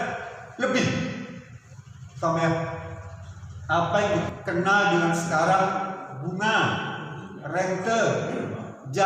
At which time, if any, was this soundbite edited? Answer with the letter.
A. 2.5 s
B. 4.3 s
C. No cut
B